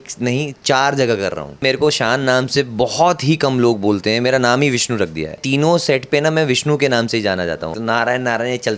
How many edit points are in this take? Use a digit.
3